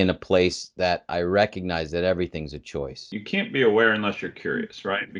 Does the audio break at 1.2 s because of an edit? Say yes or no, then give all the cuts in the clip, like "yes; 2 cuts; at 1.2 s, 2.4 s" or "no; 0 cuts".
no; 1 cut; at 3.1 s